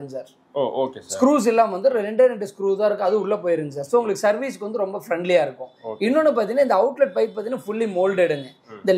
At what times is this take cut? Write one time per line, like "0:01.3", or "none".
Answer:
none